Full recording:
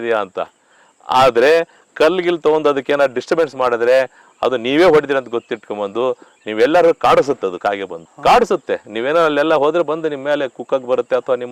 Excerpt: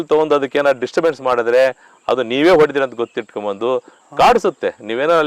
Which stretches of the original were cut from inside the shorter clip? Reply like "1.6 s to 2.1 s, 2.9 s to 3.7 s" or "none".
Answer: 6.3 s to 8.0 s

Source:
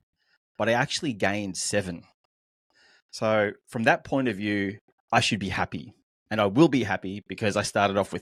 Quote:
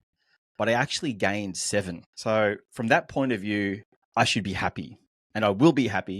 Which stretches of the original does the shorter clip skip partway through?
2.0 s to 3.0 s

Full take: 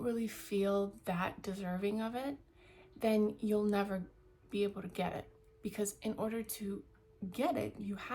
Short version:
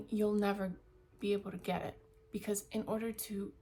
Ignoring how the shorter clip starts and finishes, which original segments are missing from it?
none

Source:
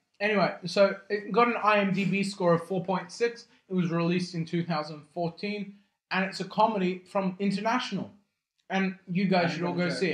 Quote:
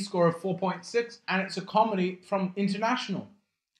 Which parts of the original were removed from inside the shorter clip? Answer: 3.4 s to 6.0 s

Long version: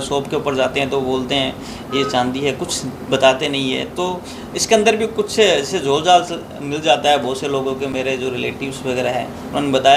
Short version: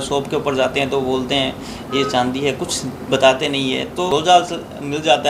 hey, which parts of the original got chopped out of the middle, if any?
4.1 s to 5.9 s

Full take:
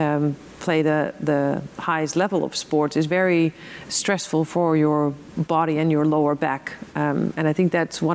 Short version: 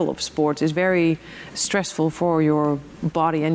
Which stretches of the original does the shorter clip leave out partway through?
none

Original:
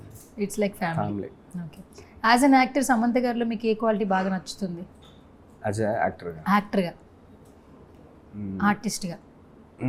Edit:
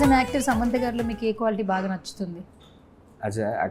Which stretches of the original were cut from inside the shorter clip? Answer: none

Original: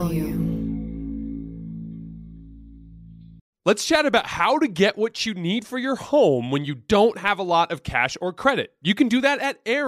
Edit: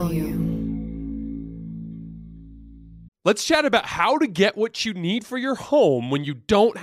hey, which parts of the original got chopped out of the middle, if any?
3.0 s to 3.4 s

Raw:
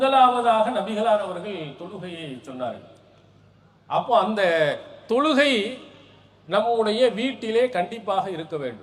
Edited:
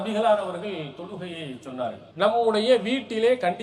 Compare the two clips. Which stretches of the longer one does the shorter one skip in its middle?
2.8 s to 6.3 s

